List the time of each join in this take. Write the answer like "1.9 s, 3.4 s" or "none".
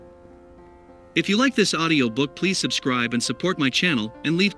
1.1 s